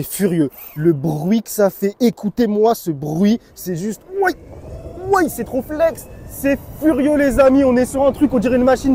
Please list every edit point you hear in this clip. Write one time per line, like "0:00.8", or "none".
none